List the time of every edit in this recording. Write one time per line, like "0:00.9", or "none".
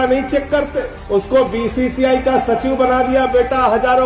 none